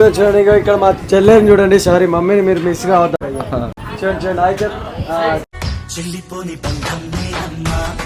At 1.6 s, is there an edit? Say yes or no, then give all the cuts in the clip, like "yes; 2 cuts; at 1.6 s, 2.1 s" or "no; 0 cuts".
no; 1 cut; at 3.2 s